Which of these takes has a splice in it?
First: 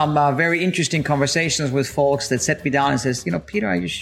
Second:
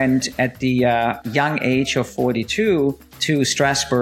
second; 2 cuts; at 1.2 s, 3.1 s

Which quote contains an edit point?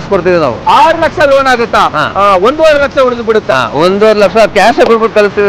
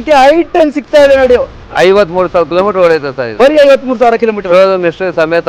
first; 1 cut; at 2.0 s

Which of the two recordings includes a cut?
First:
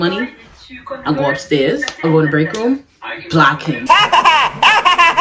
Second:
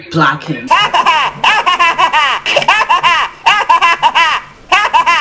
first; 1 cut; at 1.9 s

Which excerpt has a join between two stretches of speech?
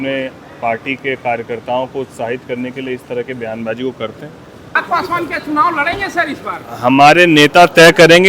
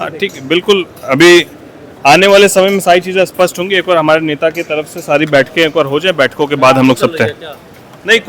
first; 1 cut; at 4.8 s

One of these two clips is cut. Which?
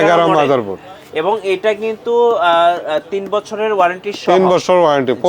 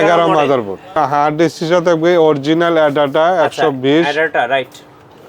second; 1 cut; at 1.0 s

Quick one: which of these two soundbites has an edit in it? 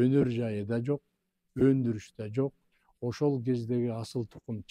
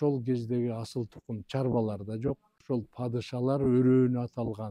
second; 1 cut; at 2.5 s

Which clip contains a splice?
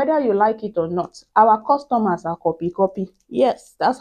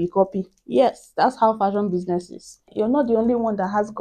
second; 1 cut; at 2.7 s

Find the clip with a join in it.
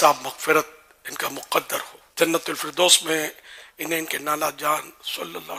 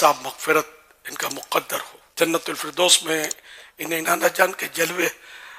second; 1 cut; at 4.0 s

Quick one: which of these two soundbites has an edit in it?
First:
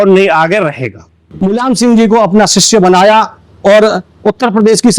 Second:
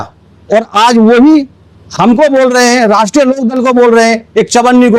first; 1 cut; at 1.3 s

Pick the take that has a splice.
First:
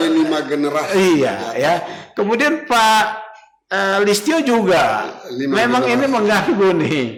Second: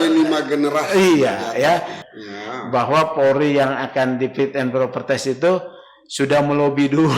second; 1 cut; at 2.0 s

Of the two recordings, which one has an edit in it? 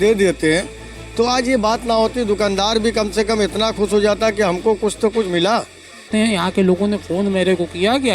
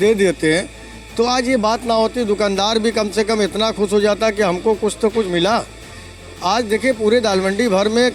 first; 1 cut; at 6.1 s

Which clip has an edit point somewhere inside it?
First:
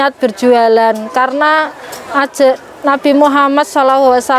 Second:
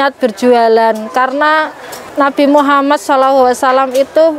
second; 1 cut; at 2.0 s

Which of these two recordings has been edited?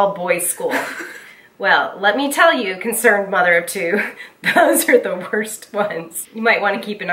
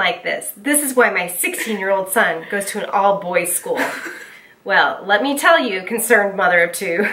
first; 1 cut; at 6.2 s

